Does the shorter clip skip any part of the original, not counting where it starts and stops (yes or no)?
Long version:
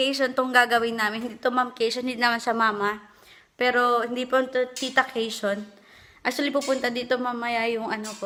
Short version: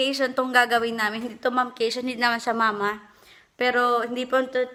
no